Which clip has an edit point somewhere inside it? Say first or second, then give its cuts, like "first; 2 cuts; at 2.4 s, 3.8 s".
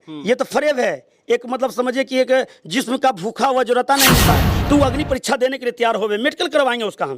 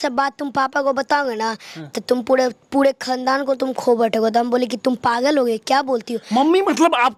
first; 1 cut; at 4.3 s